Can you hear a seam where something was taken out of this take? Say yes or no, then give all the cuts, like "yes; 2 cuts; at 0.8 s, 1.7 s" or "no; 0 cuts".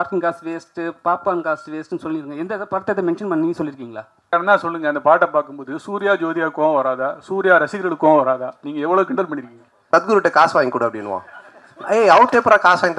yes; 2 cuts; at 4.3 s, 9.8 s